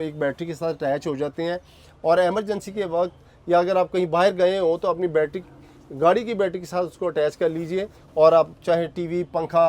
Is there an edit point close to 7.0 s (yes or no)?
no